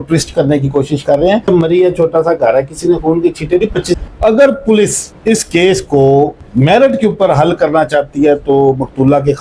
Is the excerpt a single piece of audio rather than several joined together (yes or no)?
no